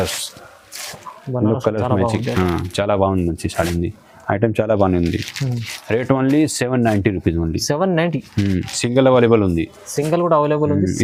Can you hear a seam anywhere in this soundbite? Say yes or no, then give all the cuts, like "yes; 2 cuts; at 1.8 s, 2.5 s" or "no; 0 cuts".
no; 0 cuts